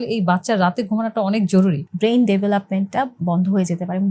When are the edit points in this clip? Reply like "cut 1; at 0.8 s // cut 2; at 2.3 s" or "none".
cut 1; at 1.9 s